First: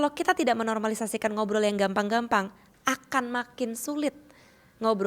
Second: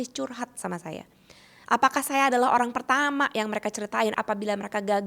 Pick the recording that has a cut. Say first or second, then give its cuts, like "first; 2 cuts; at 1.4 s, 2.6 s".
second; 1 cut; at 4.1 s